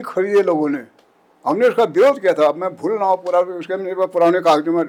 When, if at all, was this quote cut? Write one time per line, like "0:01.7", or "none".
none